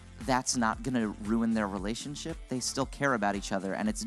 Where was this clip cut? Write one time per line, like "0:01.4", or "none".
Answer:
none